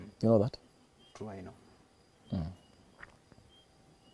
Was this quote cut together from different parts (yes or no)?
no